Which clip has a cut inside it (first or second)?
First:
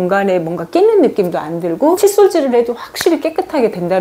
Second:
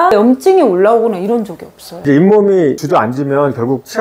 second